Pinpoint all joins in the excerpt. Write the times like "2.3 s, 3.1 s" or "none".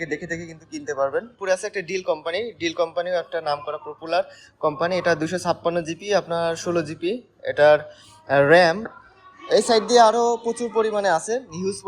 1.3 s, 8.9 s